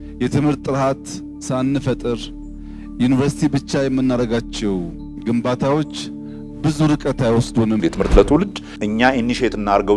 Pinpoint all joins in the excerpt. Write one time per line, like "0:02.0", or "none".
0:07.8